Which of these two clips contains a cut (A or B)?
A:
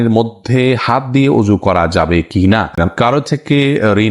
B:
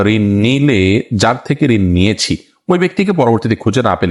A